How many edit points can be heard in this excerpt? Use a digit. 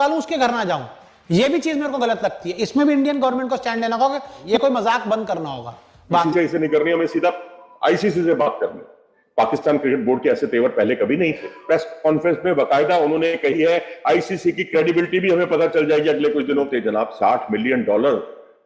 4